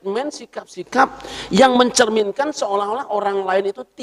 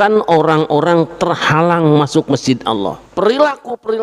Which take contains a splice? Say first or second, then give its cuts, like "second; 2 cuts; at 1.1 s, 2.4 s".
second; 1 cut; at 3.0 s